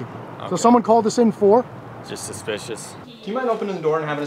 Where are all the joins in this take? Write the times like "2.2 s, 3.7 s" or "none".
3.0 s